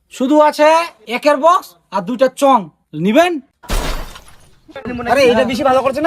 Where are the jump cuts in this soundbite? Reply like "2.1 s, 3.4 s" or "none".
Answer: 1.0 s, 2.8 s, 4.8 s